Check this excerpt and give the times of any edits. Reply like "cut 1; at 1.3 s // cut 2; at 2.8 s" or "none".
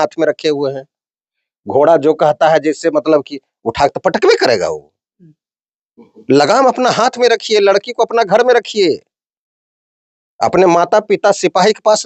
none